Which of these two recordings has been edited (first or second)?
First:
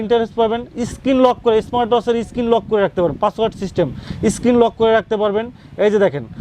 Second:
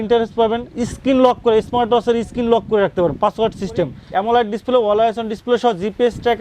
second